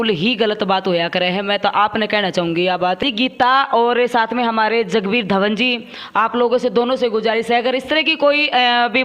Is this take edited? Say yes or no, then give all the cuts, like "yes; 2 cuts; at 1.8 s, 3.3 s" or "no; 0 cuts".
yes; 1 cut; at 3.0 s